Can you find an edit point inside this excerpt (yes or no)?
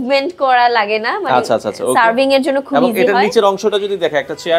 no